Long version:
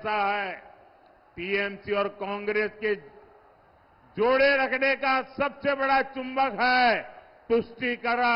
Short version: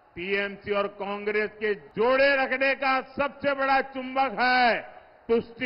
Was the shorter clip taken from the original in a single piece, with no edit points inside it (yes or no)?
no